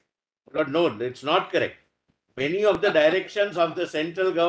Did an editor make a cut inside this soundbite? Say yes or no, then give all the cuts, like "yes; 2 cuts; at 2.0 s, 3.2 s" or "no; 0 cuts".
no; 0 cuts